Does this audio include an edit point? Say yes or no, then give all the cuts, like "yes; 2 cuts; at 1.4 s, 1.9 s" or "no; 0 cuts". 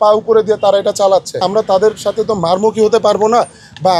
yes; 1 cut; at 1.4 s